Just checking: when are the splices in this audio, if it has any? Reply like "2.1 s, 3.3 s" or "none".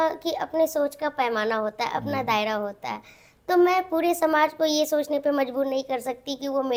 none